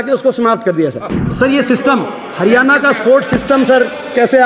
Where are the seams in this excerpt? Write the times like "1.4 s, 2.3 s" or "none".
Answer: 1.2 s